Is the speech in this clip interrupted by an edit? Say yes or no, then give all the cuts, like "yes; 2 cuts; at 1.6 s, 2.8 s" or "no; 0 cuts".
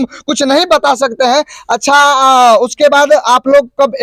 no; 0 cuts